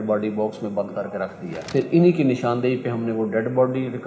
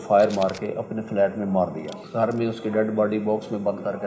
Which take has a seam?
second; 1 cut; at 1.9 s

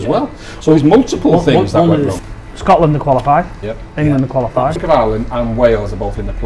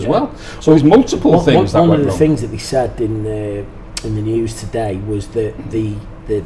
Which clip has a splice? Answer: first; 2 cuts; at 2.1 s, 4.8 s

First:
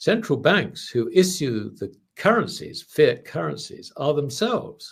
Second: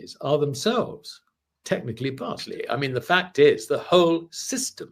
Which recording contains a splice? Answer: second; 1 cut; at 2.5 s

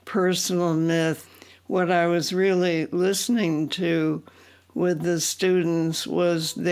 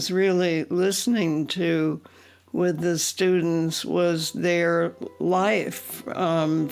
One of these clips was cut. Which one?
first; 1 cut; at 1.3 s

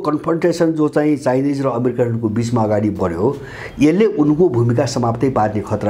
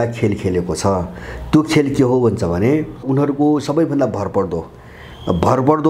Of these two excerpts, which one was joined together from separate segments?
second; 1 cut; at 3.1 s

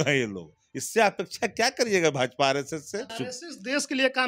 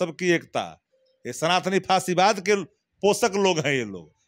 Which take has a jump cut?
first; 1 cut; at 3.1 s

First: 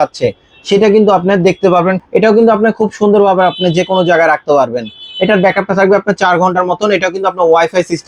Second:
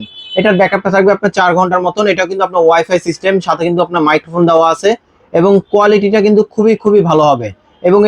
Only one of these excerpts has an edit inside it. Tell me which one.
first; 1 cut; at 2.0 s

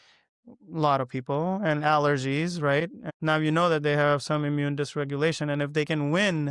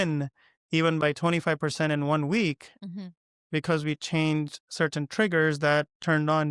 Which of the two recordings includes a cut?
first; 1 cut; at 3.0 s

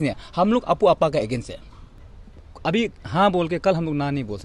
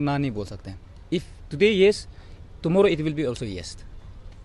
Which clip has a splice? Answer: first; 1 cut; at 2.1 s

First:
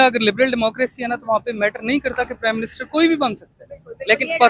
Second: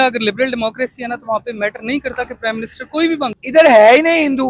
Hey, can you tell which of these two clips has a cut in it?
second; 1 cut; at 3.4 s

